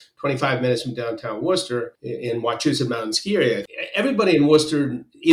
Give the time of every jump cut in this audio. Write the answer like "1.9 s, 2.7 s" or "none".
2.0 s, 3.6 s